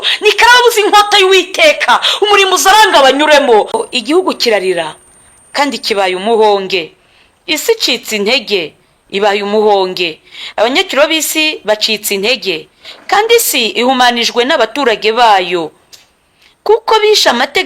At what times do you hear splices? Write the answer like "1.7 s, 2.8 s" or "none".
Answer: 3.8 s